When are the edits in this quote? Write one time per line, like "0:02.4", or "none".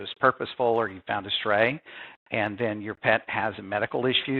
none